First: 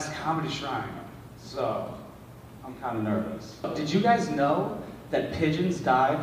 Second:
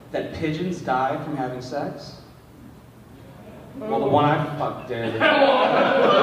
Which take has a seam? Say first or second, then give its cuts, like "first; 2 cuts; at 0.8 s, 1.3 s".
first; 1 cut; at 3.7 s